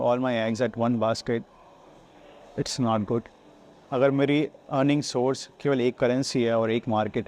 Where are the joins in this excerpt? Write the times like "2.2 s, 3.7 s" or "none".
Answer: none